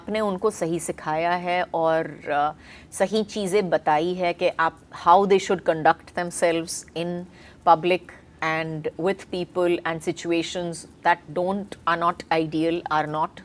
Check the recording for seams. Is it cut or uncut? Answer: uncut